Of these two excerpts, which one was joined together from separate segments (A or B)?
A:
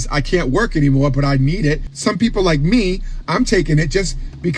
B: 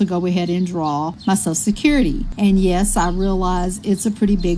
A